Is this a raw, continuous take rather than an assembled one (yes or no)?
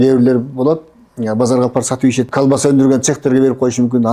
no